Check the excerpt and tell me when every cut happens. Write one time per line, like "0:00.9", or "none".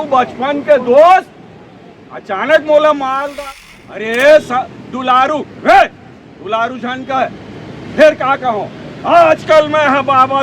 0:03.4